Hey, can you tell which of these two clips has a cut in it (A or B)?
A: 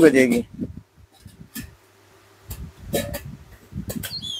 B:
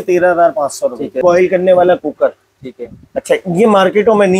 B